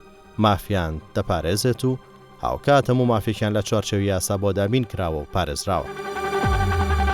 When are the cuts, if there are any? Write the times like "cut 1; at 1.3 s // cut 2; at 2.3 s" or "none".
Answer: cut 1; at 6.0 s